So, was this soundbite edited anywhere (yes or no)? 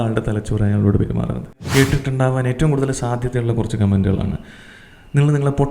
yes